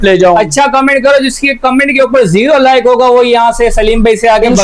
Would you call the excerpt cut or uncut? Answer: uncut